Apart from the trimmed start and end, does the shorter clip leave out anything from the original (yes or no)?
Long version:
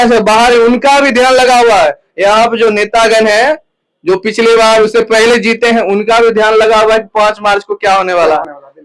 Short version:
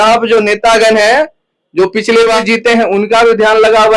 yes